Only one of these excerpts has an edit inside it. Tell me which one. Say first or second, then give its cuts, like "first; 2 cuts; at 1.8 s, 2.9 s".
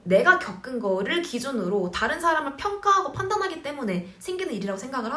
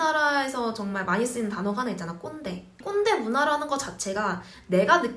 second; 1 cut; at 2.8 s